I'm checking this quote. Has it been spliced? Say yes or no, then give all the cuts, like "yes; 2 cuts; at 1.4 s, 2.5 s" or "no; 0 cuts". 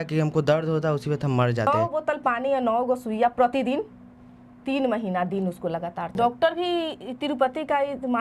yes; 2 cuts; at 1.8 s, 6.1 s